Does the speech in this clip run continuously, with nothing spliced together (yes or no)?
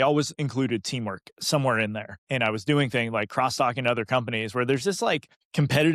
yes